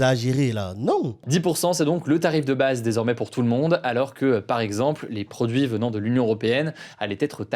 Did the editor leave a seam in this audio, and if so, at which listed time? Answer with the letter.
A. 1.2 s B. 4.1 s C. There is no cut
A